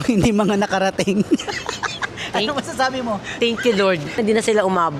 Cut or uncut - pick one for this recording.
cut